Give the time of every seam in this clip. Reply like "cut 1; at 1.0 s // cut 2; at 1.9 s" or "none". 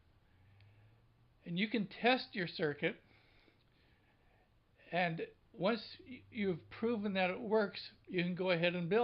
cut 1; at 6.2 s

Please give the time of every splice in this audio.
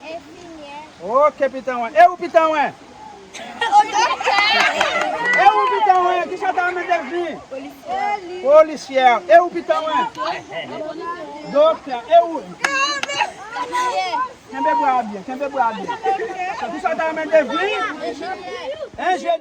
none

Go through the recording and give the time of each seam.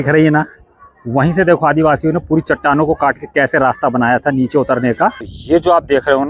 cut 1; at 5.3 s

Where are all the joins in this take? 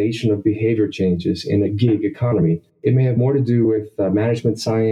cut 1; at 2.7 s

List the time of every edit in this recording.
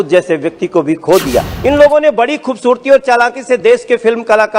cut 1; at 1.5 s

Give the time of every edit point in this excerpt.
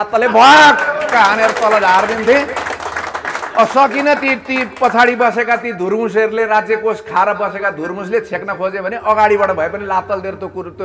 none

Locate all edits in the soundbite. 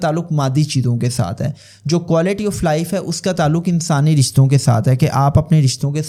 none

